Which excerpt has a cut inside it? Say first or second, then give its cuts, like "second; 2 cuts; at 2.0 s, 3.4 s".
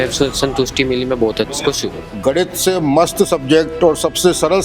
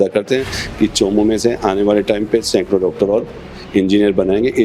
first; 1 cut; at 2.0 s